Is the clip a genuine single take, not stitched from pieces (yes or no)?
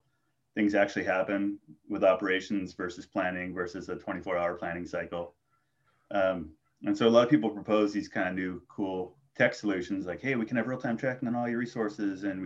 no